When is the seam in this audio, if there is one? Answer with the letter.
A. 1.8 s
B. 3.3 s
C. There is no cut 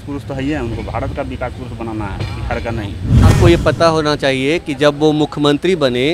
B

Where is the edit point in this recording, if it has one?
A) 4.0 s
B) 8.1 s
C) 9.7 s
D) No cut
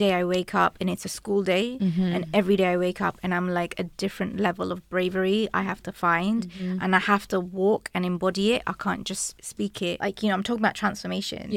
C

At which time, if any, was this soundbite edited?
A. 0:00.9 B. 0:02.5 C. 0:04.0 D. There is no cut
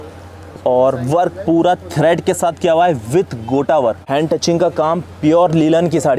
C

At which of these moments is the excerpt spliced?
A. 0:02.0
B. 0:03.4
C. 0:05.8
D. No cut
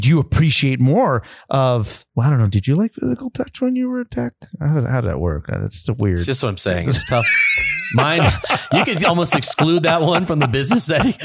A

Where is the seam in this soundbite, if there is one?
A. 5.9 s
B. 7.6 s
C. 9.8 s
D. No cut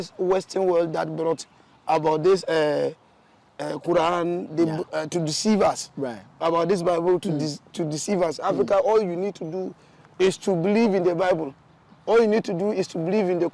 D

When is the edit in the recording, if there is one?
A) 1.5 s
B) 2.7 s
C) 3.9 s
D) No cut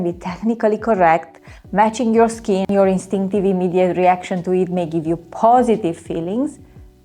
B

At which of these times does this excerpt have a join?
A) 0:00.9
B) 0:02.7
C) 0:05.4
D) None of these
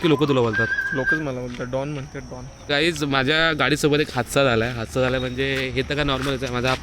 B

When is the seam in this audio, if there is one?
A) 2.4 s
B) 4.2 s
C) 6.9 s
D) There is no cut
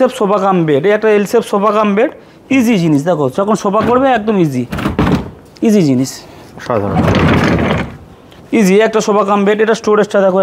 D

